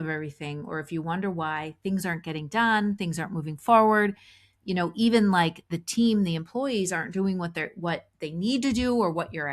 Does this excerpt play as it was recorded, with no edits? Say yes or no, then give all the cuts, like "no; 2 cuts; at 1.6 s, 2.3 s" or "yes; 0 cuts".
yes; 0 cuts